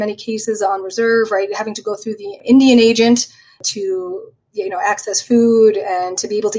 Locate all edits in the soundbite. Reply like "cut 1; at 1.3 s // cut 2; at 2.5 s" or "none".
cut 1; at 2.4 s // cut 2; at 3.6 s